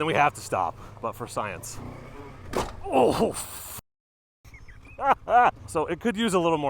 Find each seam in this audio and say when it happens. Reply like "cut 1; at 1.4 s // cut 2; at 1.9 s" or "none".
cut 1; at 0.9 s // cut 2; at 1.7 s // cut 3; at 5.6 s